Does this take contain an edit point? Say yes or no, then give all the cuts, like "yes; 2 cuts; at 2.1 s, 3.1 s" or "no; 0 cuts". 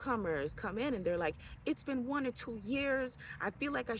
no; 0 cuts